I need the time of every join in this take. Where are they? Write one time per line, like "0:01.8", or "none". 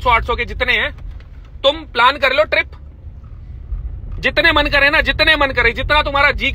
none